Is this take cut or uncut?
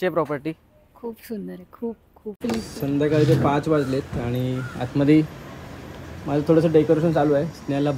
cut